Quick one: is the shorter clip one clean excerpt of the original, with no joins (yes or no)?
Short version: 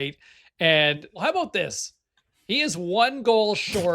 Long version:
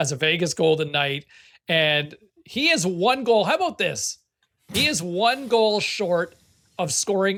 no